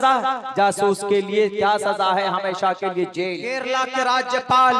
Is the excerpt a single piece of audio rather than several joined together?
no; 1 cut; at 3.6 s

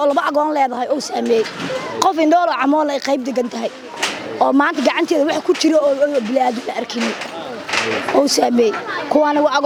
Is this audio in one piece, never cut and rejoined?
yes; 0 cuts

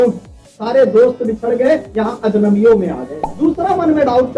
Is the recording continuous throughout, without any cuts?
no; 1 cut; at 3.2 s

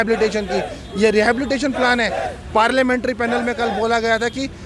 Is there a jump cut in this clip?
no; 0 cuts

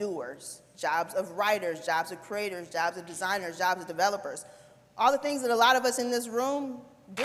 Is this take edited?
no; 0 cuts

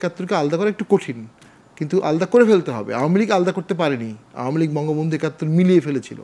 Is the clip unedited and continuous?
yes; 0 cuts

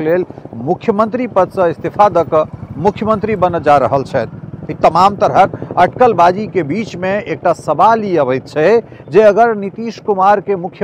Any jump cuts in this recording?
no; 0 cuts

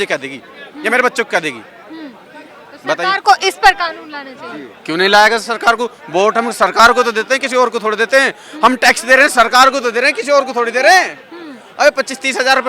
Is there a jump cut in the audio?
no; 0 cuts

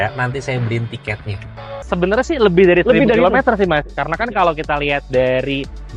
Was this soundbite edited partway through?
yes; 1 cut; at 1.9 s

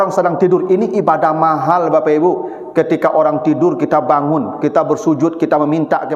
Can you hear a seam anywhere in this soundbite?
no; 0 cuts

